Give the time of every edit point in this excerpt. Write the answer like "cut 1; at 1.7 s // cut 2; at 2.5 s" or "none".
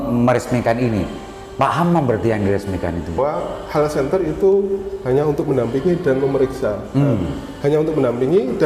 cut 1; at 3.1 s